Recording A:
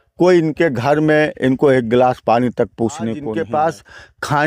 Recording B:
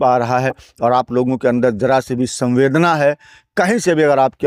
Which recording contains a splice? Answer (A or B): A